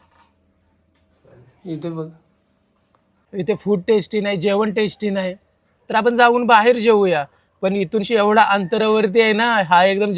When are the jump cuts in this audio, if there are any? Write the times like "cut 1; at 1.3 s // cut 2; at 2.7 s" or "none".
cut 1; at 3.2 s